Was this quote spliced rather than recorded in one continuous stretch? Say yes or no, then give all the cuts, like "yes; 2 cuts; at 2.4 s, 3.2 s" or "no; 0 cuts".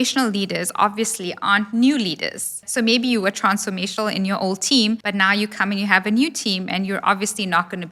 yes; 2 cuts; at 2.6 s, 5.0 s